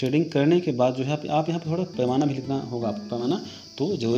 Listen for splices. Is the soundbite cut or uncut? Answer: cut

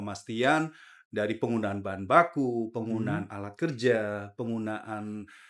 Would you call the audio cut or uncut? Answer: uncut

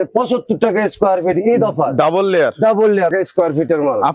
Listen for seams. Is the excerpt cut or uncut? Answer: cut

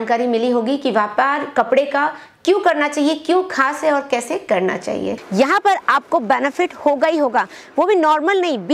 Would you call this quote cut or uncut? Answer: cut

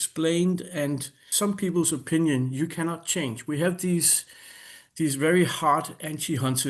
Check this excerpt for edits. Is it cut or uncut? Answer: cut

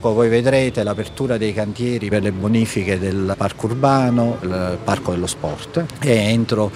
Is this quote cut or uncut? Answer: cut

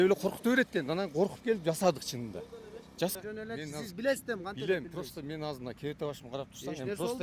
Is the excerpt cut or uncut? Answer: cut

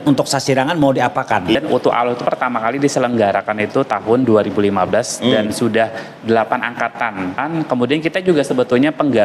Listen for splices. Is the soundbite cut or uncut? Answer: cut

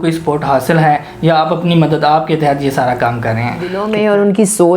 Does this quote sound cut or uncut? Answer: cut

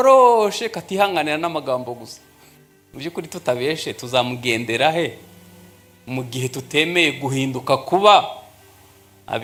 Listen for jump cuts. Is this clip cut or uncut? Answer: uncut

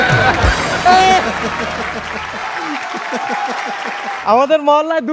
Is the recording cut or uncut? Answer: cut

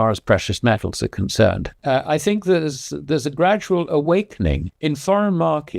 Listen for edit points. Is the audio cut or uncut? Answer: cut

